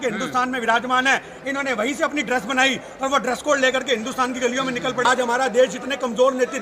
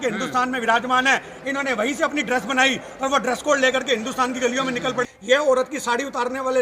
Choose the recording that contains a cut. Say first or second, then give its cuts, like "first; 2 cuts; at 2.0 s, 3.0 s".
second; 1 cut; at 5.0 s